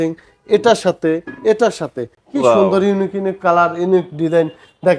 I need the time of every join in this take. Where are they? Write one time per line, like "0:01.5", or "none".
0:02.2